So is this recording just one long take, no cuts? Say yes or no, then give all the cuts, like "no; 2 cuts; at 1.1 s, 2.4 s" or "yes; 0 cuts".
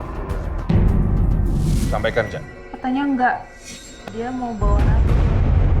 no; 1 cut; at 1.6 s